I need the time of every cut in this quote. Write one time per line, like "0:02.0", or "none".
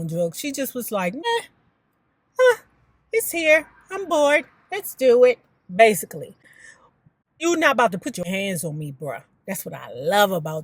0:08.3